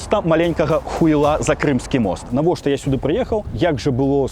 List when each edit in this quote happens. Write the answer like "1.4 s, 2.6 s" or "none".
2.2 s, 3.5 s